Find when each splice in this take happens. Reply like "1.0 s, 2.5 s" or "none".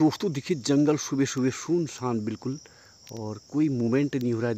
none

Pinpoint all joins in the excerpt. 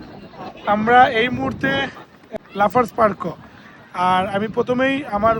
2.2 s

